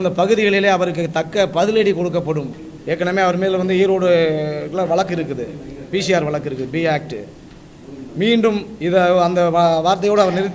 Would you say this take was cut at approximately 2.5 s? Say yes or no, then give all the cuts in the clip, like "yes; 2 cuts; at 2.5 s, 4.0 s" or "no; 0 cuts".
yes; 1 cut; at 2.5 s